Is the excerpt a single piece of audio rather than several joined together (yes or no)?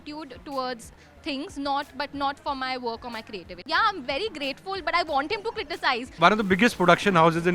no